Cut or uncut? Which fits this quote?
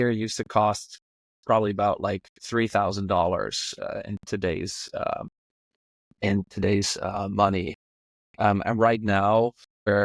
uncut